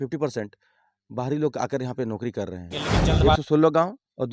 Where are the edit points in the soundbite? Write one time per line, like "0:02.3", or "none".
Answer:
0:03.0